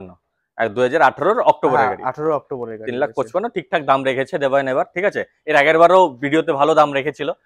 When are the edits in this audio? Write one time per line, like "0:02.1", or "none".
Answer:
none